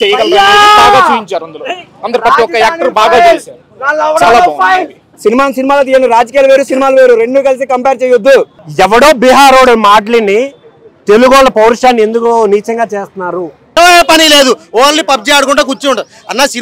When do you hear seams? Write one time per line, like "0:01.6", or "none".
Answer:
0:05.1
0:08.6
0:13.8